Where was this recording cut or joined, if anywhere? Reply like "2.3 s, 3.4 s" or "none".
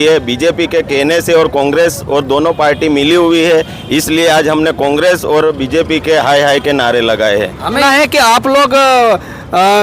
7.8 s

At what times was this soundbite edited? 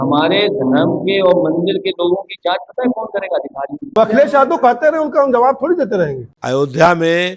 4.0 s, 6.3 s

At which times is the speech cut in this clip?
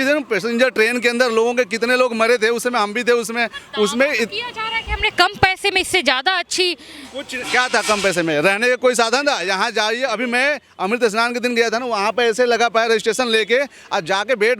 none

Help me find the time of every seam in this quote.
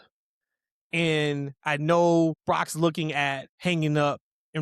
2.4 s, 3.5 s

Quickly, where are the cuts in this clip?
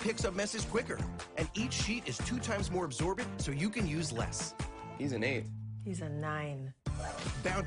3.3 s

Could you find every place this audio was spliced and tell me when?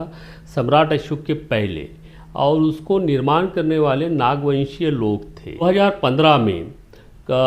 5.6 s

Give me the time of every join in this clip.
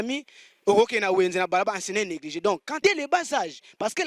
2.7 s

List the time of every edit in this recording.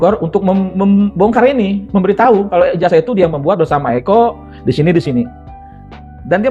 none

